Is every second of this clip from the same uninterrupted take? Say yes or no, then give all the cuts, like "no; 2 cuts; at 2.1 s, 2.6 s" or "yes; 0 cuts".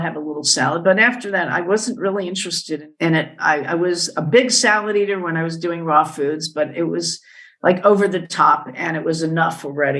no; 1 cut; at 2.8 s